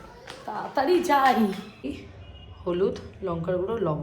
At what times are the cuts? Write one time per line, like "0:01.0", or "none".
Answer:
0:01.9